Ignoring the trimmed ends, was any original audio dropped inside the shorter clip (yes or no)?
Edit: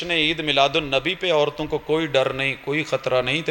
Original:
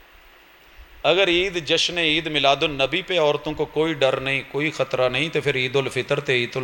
no